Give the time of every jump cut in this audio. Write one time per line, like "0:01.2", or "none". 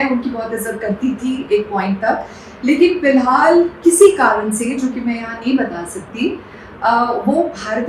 none